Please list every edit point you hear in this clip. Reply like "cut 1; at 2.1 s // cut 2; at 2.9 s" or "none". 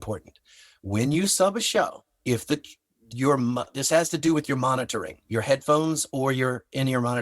cut 1; at 2.1 s